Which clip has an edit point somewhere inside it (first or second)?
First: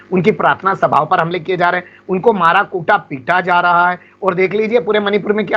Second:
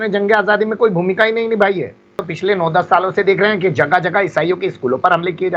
second